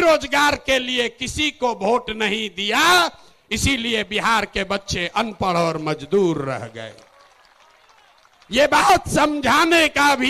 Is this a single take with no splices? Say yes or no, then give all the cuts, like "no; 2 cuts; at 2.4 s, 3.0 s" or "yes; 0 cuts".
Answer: yes; 0 cuts